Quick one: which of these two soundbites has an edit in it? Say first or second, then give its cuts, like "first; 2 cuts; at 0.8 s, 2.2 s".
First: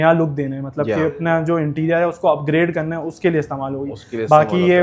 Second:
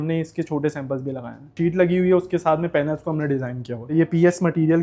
second; 2 cuts; at 1.5 s, 3.9 s